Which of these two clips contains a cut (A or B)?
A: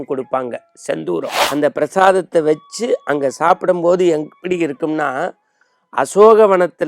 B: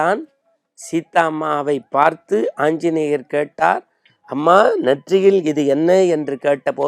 A